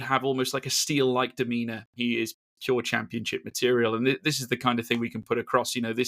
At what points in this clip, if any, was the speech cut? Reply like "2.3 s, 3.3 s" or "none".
1.9 s